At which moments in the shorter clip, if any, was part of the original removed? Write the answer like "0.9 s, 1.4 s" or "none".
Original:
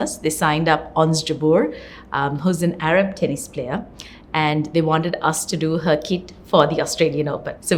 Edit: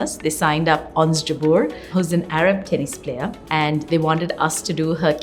1.9 s, 3.4 s

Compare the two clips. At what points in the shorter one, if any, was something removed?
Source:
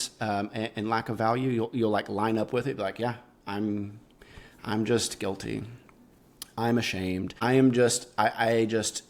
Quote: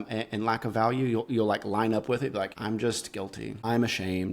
2.5 s, 3.6 s

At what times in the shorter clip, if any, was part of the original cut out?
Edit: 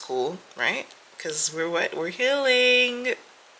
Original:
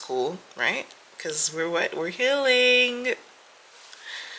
none

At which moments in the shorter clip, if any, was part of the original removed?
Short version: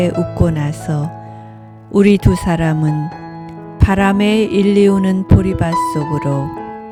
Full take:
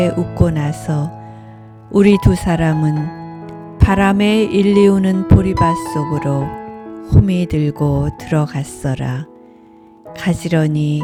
none

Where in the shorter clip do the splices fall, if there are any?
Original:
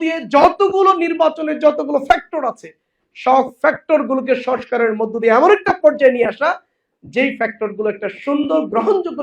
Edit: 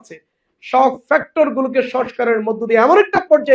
none

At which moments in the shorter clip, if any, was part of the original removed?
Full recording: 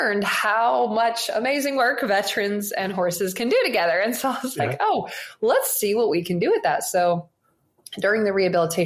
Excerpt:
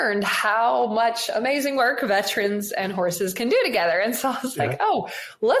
none

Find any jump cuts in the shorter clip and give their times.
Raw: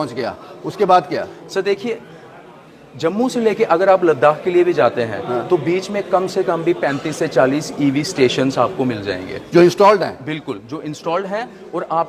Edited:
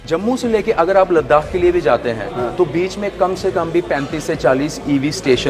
none

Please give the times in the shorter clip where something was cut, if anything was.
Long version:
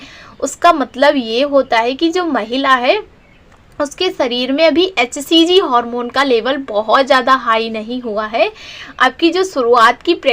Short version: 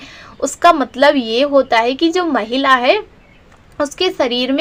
none

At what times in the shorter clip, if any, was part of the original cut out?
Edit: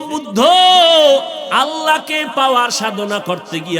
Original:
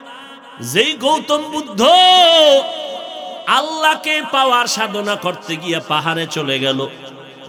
1.4 s

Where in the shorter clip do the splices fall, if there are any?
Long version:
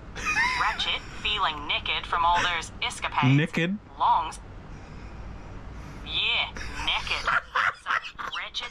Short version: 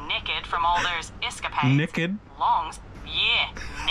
3.0 s

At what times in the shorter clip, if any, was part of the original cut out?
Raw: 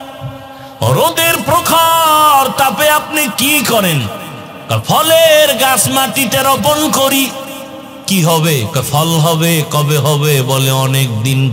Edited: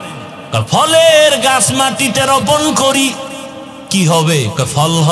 none

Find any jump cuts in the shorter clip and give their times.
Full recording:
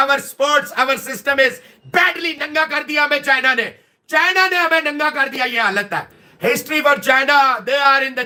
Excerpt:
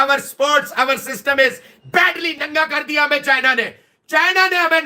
none

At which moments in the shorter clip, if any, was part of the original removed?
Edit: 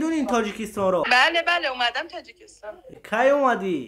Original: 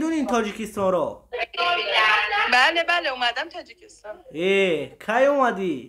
1.1 s, 2.9 s

